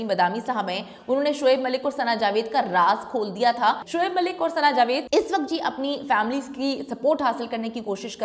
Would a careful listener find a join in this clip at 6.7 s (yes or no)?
no